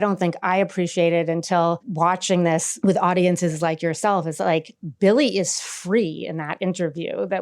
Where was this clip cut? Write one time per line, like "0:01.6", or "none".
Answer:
0:01.9
0:02.7

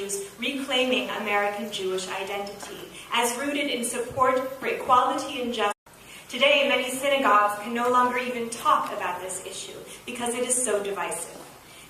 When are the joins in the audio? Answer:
none

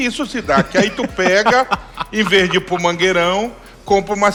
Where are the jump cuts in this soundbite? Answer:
none

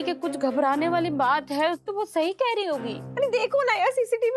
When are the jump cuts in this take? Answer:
0:01.8
0:03.0

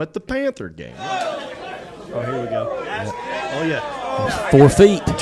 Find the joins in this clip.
0:00.9

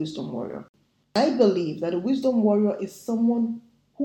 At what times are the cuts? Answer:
0:01.1

